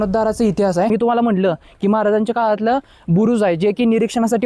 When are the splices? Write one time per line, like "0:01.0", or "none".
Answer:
0:00.9